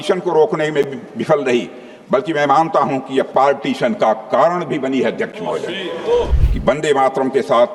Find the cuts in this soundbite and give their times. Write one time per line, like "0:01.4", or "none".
0:06.4